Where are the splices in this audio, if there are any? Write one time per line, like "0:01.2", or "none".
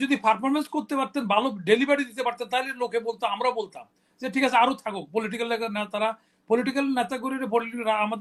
none